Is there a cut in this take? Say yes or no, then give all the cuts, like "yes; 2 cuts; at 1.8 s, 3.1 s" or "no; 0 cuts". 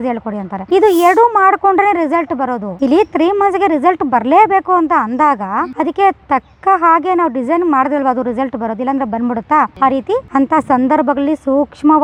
no; 0 cuts